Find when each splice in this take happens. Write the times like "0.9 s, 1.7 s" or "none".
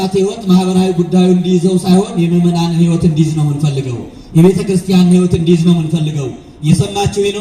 none